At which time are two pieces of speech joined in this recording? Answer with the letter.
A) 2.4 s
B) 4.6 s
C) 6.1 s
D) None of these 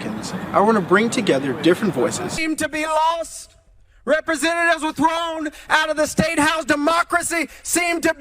A